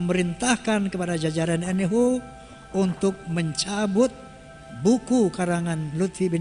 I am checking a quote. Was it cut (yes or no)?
no